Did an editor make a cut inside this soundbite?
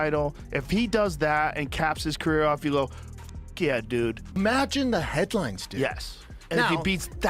yes; 1 cut; at 4.2 s

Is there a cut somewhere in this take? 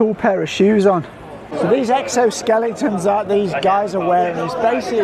yes; 1 cut; at 1.4 s

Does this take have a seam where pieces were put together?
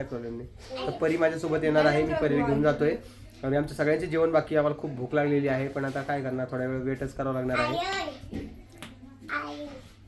no; 0 cuts

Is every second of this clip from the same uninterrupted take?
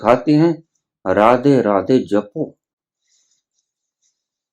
yes; 0 cuts

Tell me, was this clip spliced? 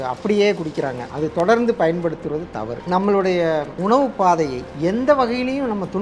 yes; 3 cuts; at 1.0 s, 3.7 s, 4.6 s

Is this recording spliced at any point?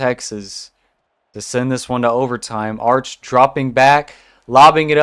no; 0 cuts

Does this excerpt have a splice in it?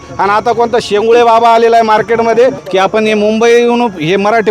yes; 1 cut; at 2.6 s

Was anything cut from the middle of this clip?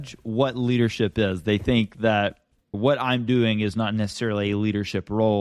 no; 0 cuts

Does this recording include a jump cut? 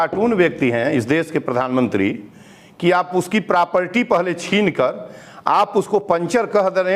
no; 0 cuts

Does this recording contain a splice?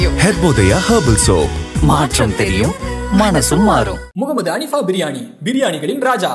no; 0 cuts

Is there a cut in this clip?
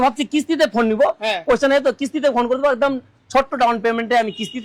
no; 0 cuts

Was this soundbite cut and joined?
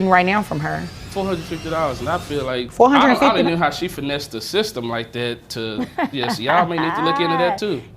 yes; 2 cuts; at 1.0 s, 2.7 s

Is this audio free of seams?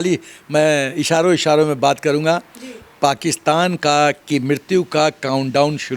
yes; 0 cuts

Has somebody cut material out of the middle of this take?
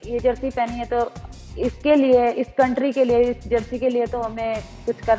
no; 0 cuts

